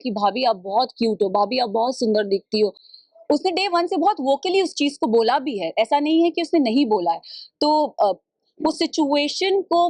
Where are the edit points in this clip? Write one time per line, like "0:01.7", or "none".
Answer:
none